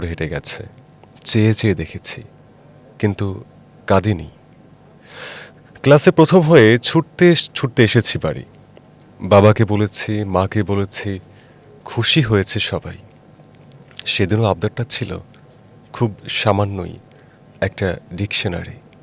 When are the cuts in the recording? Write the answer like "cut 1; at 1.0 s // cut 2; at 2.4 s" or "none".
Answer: none